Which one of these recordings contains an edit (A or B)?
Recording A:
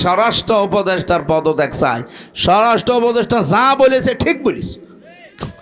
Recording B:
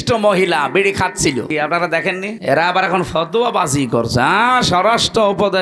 B